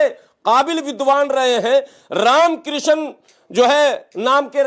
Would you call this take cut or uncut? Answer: uncut